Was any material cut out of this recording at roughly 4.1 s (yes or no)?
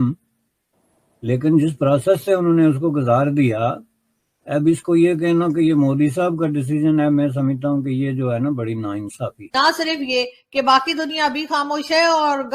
no